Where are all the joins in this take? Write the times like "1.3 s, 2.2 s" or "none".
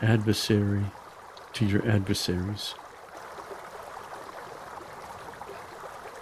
2.7 s